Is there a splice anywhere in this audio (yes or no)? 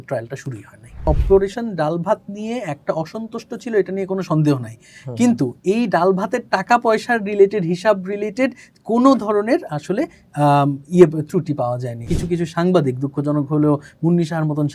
yes